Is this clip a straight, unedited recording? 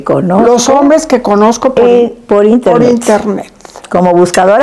yes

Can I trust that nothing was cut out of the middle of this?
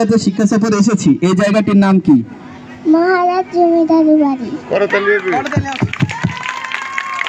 yes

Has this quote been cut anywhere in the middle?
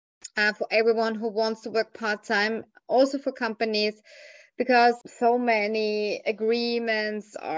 yes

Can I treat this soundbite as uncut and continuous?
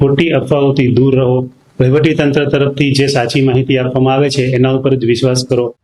yes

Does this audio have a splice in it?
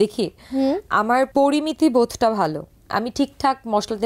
yes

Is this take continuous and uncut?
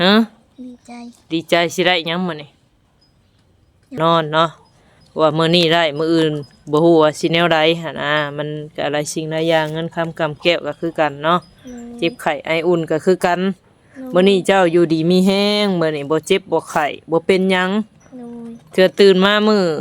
no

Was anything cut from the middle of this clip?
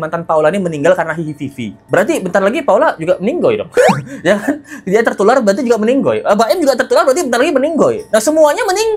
no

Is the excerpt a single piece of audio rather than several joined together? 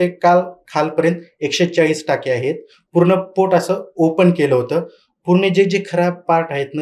yes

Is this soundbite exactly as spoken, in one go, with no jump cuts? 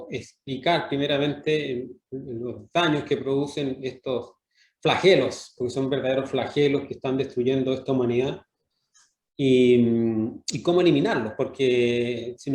yes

